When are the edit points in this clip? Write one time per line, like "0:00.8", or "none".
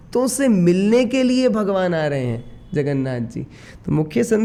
none